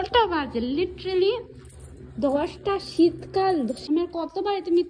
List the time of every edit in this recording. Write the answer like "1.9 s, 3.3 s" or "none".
3.8 s